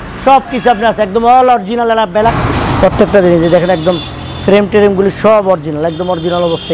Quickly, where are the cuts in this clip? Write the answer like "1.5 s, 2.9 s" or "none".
2.4 s